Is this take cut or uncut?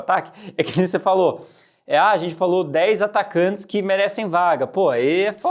uncut